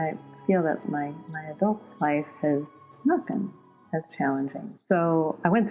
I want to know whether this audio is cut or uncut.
uncut